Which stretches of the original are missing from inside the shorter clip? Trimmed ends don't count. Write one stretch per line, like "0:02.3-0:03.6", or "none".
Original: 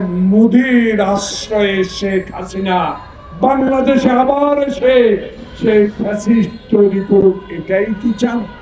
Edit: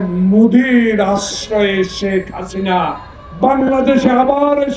none

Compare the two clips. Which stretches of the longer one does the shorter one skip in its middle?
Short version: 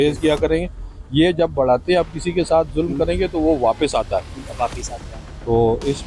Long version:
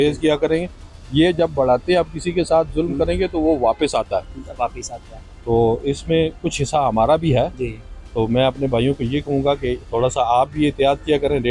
none

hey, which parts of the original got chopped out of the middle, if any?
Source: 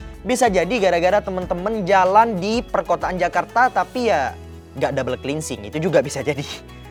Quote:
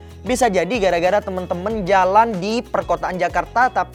none

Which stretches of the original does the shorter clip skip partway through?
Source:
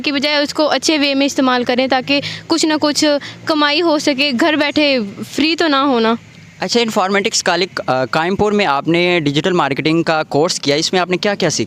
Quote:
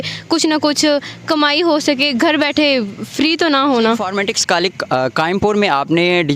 0:06.3-0:07.0

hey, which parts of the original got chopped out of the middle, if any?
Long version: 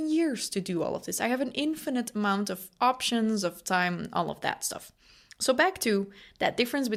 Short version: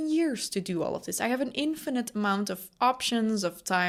none

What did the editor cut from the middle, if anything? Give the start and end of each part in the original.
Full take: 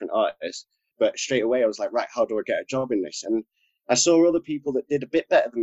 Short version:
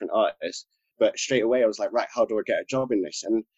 none

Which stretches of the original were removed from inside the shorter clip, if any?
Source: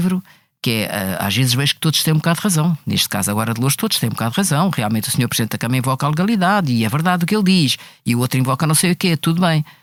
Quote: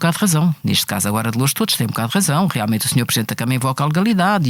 none

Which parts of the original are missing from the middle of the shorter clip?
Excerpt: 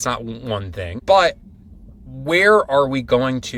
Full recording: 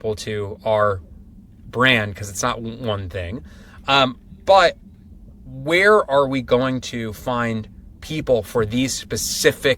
0:03.3-0:04.3

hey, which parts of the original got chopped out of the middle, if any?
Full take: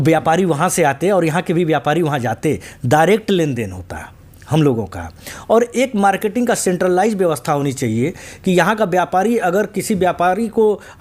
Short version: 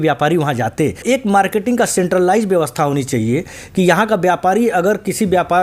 0:02.7-0:05.7

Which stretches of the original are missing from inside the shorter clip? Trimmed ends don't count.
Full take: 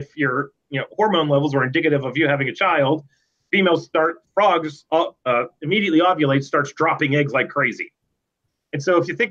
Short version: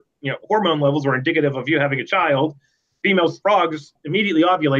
0:04.3-0:05.4

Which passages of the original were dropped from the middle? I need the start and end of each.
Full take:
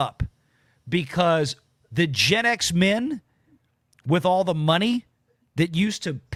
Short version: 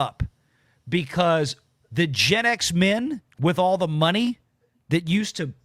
0:03.3-0:03.9

